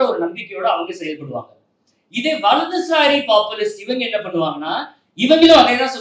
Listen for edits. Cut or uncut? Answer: uncut